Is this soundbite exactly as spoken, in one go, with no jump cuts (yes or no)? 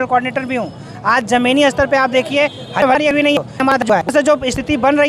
yes